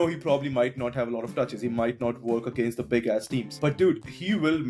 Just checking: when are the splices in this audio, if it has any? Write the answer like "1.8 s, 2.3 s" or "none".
none